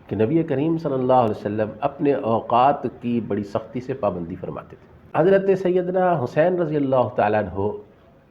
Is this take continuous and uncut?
no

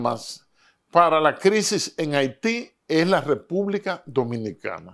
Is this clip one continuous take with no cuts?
yes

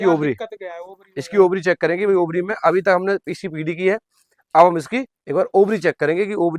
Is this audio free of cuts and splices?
yes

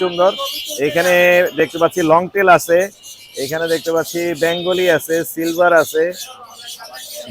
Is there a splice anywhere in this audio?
no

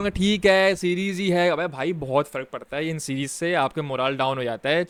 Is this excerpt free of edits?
yes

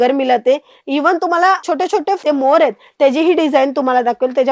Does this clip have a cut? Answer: yes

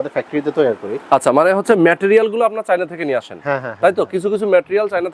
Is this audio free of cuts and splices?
yes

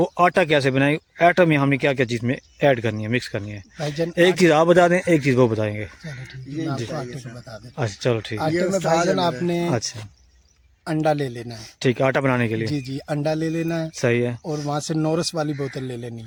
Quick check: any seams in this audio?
no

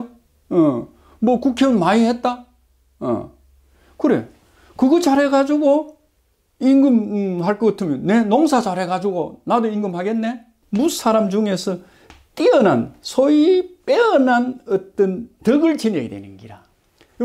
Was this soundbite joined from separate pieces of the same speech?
yes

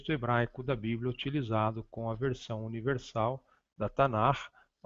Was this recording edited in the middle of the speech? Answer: no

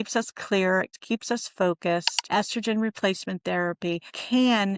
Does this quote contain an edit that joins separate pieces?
yes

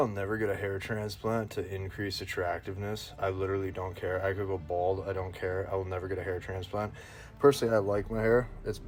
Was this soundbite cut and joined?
no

